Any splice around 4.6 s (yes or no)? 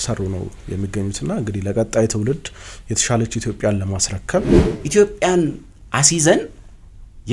yes